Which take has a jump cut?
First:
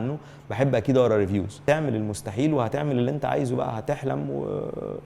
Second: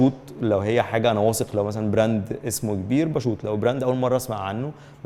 first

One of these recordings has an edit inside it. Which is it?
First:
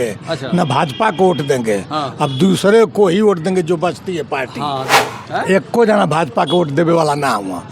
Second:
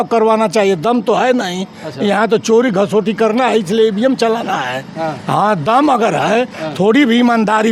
first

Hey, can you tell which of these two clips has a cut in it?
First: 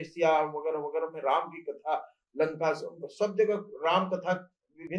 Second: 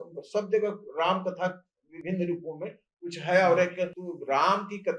second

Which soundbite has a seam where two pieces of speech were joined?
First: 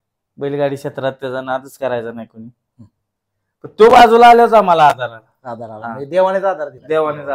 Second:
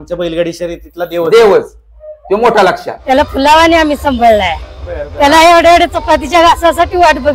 second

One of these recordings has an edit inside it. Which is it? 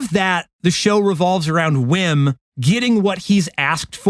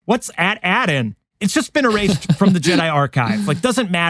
second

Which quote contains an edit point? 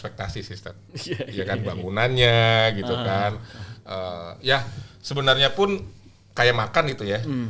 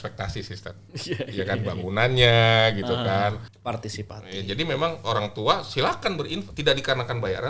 second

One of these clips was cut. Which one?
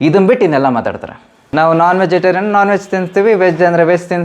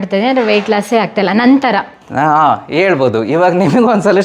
first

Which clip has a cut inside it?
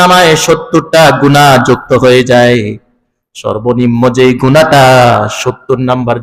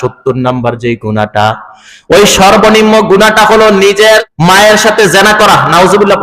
second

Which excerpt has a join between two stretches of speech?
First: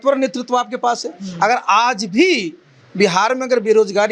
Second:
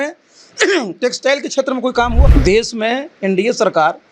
second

